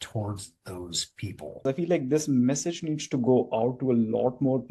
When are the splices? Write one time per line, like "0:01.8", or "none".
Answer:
0:01.6